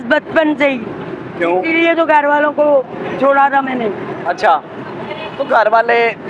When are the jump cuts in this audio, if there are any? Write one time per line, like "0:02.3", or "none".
none

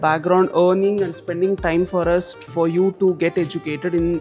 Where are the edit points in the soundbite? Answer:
none

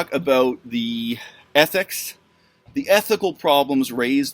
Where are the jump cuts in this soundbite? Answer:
none

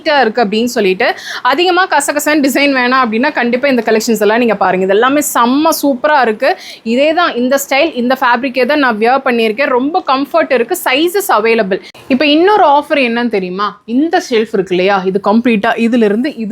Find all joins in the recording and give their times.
0:11.9

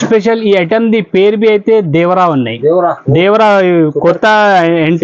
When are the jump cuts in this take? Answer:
none

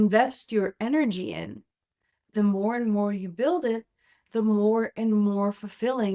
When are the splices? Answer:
0:02.3

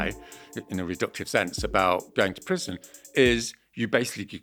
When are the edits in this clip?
none

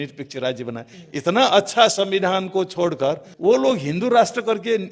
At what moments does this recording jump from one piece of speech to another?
0:00.9

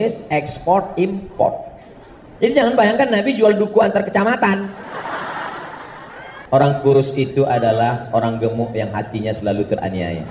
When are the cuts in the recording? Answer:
0:06.3

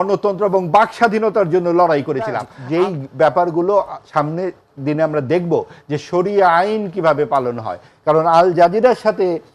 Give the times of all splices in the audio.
0:02.5

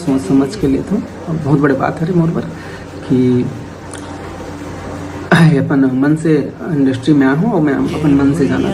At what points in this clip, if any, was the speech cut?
none

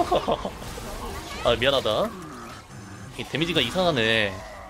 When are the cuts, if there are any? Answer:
none

